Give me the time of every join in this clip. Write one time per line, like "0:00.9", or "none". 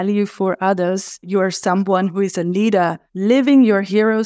0:01.3
0:03.1